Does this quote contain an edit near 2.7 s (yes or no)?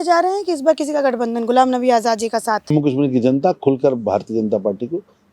yes